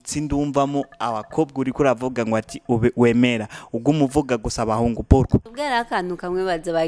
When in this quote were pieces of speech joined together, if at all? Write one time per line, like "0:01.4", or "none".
0:05.5